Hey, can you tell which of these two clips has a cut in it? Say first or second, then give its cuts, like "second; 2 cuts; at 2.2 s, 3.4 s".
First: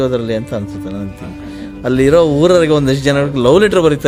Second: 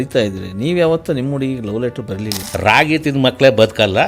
second; 1 cut; at 2.4 s